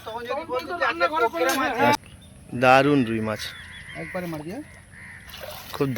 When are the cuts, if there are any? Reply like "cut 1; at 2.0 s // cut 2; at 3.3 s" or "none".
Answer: cut 1; at 1.9 s